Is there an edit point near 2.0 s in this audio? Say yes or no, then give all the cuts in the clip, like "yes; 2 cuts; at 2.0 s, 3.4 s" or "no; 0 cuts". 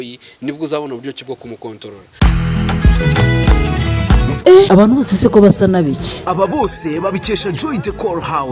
yes; 1 cut; at 2.0 s